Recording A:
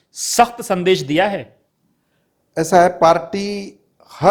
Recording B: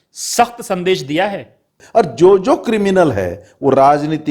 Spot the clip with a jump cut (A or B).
B